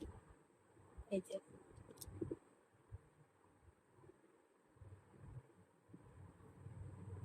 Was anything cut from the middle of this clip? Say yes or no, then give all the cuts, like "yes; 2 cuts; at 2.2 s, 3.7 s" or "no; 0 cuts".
no; 0 cuts